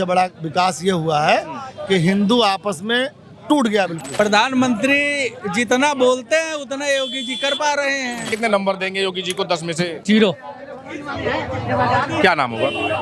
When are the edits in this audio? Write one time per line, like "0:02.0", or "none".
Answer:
0:04.1
0:08.3
0:10.0